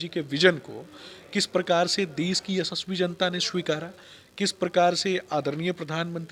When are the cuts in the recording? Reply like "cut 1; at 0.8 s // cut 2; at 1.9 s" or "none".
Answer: none